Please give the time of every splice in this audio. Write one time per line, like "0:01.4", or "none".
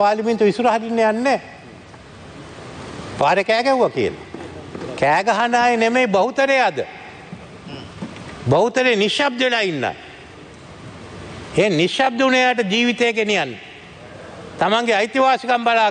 none